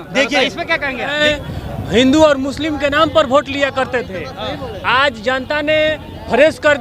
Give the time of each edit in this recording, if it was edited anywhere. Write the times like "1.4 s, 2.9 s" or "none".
1.2 s